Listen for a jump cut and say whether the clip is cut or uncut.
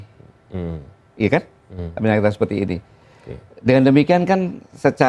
uncut